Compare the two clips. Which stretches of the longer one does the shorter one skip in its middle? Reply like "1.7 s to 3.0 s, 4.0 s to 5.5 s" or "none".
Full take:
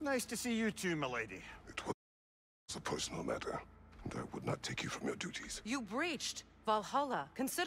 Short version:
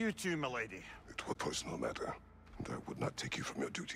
2.0 s to 2.8 s